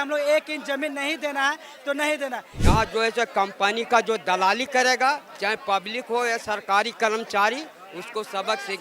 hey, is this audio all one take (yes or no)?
no